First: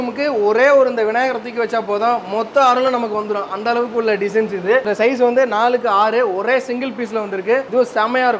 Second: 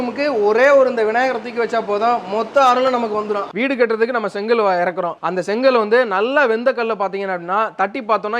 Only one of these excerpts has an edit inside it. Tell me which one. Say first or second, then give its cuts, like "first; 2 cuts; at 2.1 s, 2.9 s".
second; 1 cut; at 3.5 s